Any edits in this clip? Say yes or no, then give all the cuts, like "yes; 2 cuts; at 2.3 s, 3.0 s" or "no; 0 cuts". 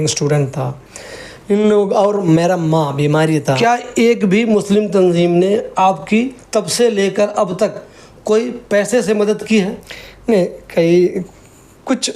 yes; 1 cut; at 3.4 s